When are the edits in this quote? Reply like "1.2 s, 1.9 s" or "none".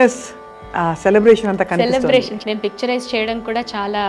2.3 s